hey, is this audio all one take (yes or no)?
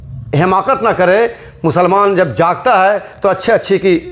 yes